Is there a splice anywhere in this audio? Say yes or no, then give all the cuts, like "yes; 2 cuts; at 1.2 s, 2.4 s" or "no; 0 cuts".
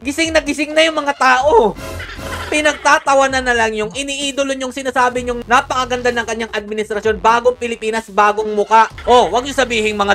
yes; 1 cut; at 8.9 s